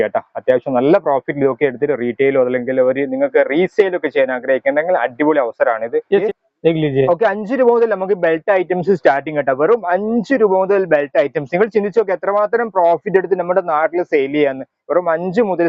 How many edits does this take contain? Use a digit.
1